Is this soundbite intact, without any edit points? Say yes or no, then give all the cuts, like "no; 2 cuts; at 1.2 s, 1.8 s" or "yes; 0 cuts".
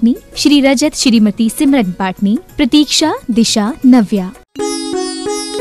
no; 1 cut; at 4.3 s